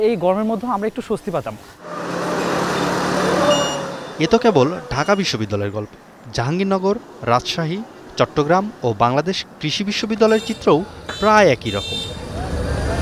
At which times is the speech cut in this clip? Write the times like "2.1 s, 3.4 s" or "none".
none